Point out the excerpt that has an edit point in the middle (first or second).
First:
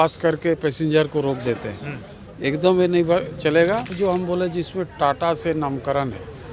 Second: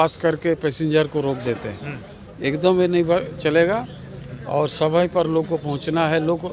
first